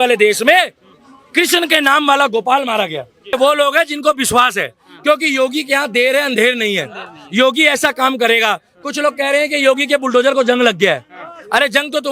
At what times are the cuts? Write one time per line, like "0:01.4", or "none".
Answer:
0:03.4

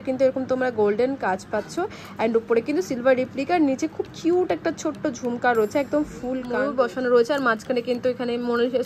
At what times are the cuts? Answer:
0:06.5

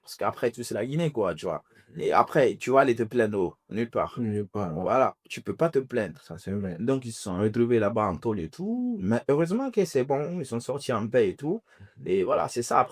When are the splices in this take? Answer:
none

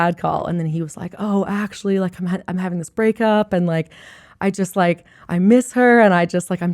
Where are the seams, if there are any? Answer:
none

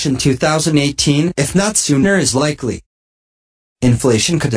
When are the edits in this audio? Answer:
0:00.9

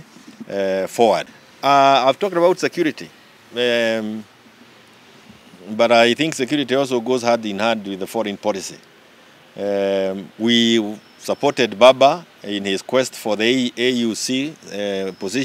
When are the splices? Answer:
0:01.4

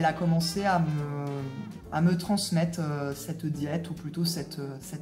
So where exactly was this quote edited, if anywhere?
none

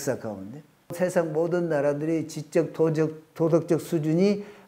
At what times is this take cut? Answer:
0:00.9

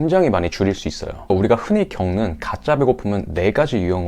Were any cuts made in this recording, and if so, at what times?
0:01.3

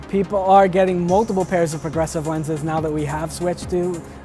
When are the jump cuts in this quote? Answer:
none

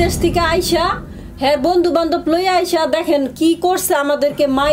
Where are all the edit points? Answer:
none

